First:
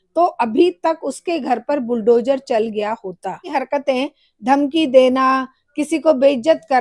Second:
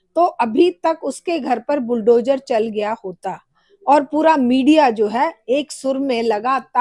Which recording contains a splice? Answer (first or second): first